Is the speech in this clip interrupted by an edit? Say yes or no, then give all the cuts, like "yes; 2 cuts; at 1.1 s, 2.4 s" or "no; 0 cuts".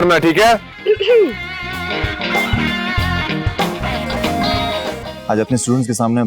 no; 0 cuts